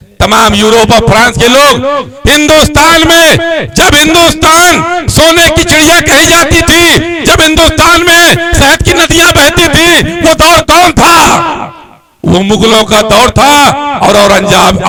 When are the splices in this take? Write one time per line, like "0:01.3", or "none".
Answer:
none